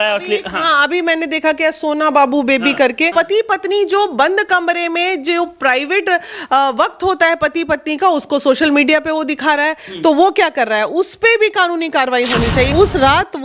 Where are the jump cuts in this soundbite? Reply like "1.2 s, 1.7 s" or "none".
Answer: 3.1 s, 12.7 s